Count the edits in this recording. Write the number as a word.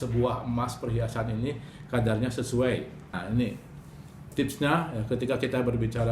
one